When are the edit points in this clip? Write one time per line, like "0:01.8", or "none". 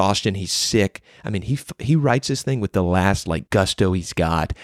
0:03.4